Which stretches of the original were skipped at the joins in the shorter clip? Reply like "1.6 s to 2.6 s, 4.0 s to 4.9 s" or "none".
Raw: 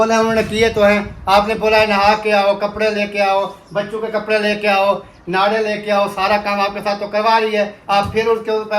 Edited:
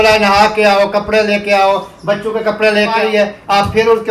4.7 s to 7.4 s

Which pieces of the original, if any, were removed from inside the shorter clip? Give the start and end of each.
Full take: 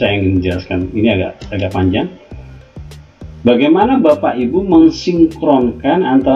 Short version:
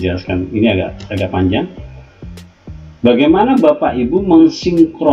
none

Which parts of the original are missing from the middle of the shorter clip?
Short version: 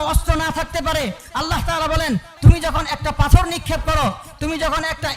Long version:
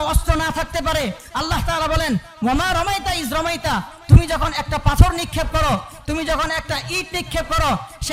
2.3 s to 4.0 s

